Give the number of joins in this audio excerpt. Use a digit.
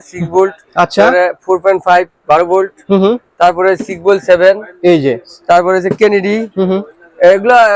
0